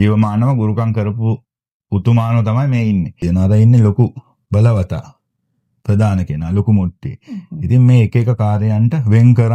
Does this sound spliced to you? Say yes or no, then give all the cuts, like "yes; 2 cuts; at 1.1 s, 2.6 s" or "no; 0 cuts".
yes; 2 cuts; at 3.2 s, 4.3 s